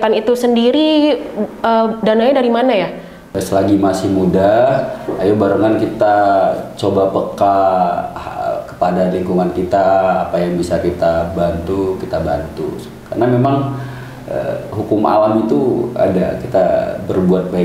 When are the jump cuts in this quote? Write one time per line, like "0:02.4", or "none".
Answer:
0:03.2